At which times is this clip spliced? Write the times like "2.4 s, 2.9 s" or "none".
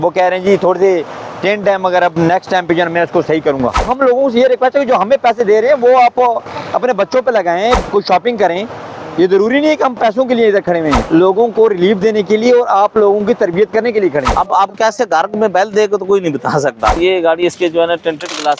3.9 s, 7.8 s, 11.0 s, 14.3 s, 17.0 s